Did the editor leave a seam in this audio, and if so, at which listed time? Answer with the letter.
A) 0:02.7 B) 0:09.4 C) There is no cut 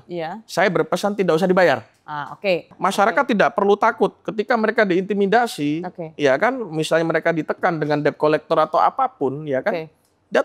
A